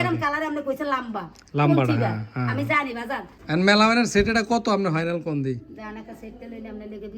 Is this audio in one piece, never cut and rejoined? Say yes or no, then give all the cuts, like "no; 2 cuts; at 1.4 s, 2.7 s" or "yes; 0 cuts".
no; 1 cut; at 3.4 s